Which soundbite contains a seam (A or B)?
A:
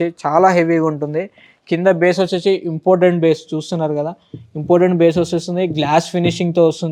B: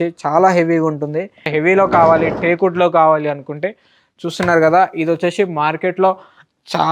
B